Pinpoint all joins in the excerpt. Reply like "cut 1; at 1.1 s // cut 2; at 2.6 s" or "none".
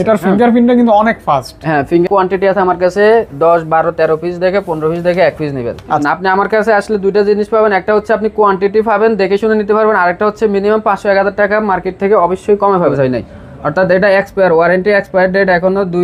cut 1; at 2.1 s // cut 2; at 6.0 s // cut 3; at 12.9 s

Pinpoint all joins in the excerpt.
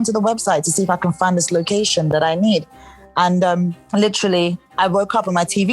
cut 1; at 3.8 s // cut 2; at 4.6 s

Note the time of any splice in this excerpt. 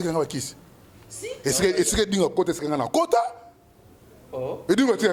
none

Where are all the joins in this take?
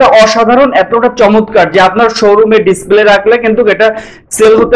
none

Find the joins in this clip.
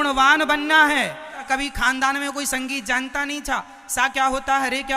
cut 1; at 1.4 s

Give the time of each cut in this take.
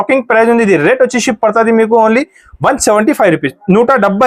none

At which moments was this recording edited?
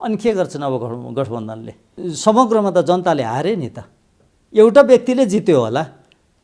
cut 1; at 1.8 s

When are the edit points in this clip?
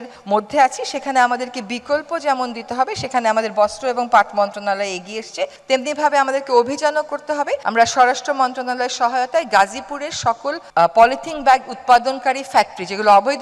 none

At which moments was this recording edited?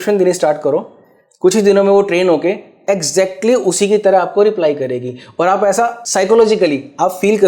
cut 1; at 6.0 s

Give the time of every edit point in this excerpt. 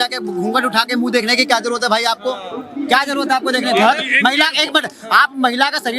none

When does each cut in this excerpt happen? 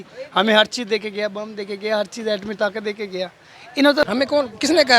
cut 1; at 4.0 s

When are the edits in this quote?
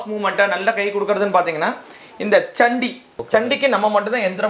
cut 1; at 3.1 s

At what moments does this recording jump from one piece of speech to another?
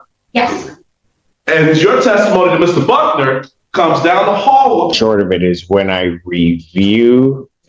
cut 1; at 5.0 s

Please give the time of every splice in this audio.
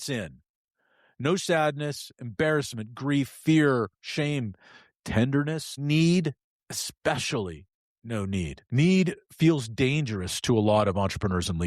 cut 1; at 5.7 s // cut 2; at 8.6 s

